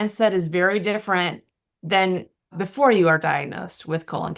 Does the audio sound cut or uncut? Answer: cut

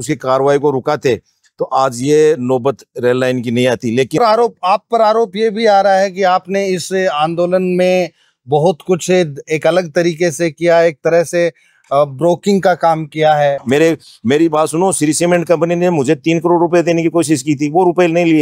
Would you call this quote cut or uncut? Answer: cut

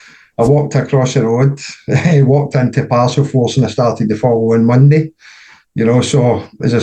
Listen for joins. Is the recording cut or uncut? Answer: uncut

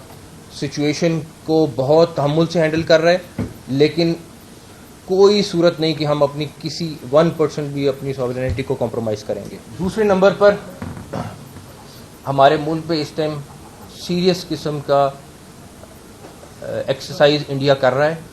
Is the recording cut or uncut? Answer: cut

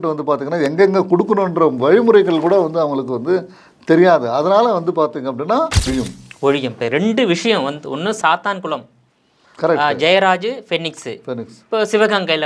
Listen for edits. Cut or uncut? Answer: cut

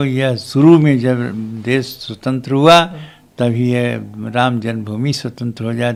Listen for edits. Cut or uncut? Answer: uncut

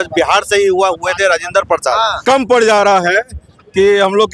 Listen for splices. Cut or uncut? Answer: cut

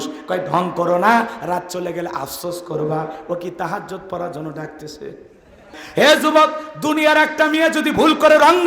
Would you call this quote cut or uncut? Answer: cut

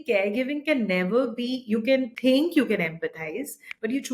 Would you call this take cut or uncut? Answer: cut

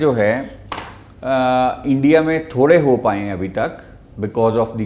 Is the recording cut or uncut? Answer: uncut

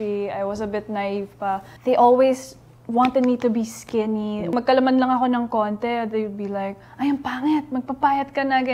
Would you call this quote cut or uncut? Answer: cut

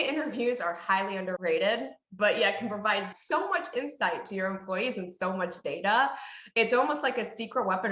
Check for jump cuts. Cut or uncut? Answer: cut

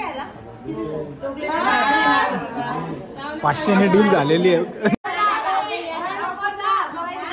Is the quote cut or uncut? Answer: cut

